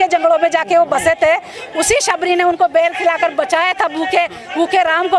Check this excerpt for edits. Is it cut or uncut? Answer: uncut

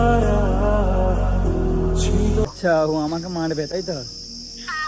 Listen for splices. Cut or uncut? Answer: cut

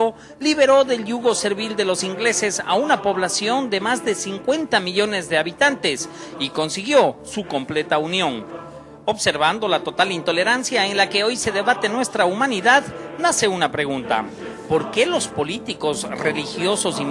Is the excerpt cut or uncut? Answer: cut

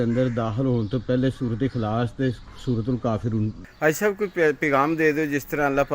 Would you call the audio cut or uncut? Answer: cut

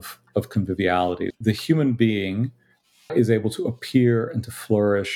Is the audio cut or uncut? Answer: cut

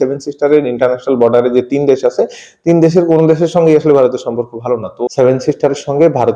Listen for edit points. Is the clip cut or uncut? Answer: cut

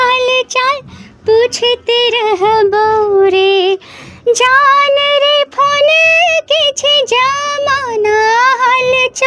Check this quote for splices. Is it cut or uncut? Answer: uncut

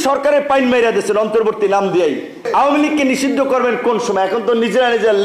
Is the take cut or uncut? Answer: cut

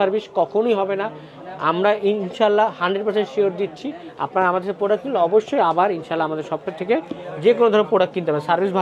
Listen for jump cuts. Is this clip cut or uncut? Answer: uncut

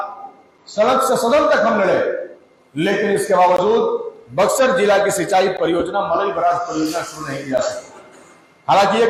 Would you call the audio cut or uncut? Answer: uncut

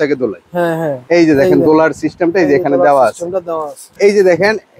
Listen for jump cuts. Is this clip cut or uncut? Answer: cut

